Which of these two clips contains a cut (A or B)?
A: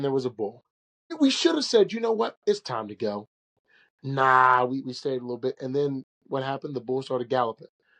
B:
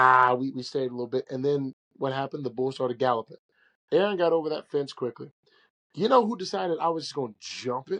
A